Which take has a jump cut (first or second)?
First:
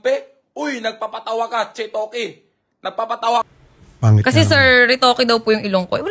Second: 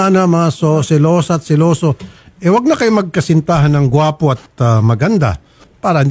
first